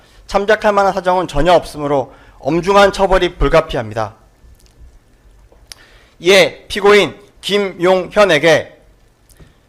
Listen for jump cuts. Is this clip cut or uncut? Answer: uncut